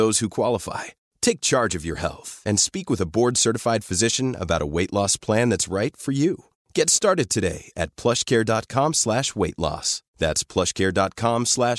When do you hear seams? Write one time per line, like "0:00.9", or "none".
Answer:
none